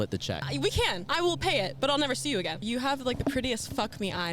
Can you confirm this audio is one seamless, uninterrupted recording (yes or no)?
no